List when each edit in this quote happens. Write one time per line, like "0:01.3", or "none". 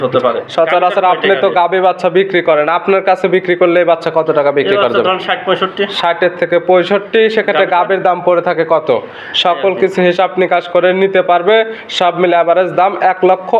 none

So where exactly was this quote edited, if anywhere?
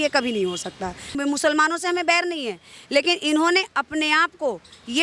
0:01.1

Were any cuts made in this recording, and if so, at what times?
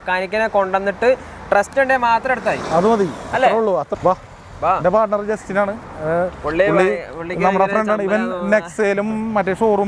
0:03.9

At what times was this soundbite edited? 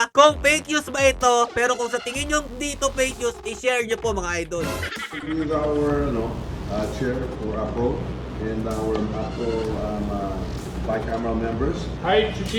0:04.9

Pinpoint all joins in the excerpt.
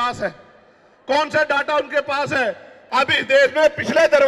0:02.7

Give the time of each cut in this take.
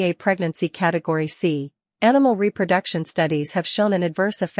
none

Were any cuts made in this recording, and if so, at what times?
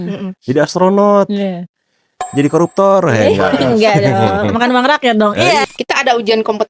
0:05.6

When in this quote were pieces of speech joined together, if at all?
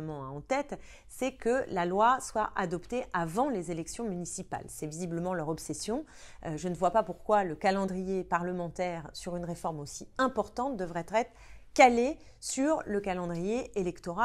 none

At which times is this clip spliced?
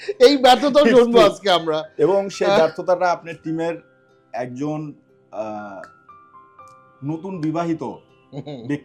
none

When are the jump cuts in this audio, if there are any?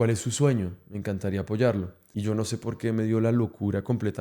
0:02.0

